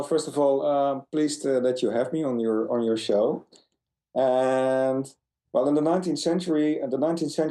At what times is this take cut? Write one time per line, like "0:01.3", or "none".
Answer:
0:01.0